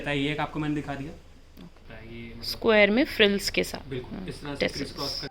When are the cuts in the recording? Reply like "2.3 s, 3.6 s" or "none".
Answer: 1.6 s